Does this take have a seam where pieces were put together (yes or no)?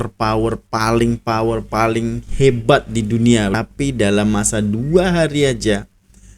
yes